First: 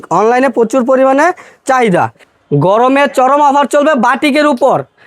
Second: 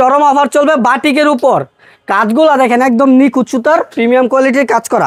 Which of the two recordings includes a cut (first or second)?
first